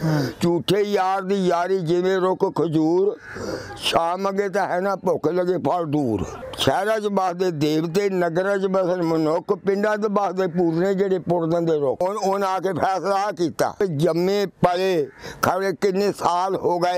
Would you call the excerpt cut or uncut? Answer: cut